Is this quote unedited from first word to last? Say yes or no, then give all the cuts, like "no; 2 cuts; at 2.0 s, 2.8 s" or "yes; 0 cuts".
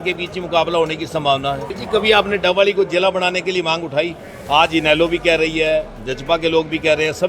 no; 1 cut; at 1.7 s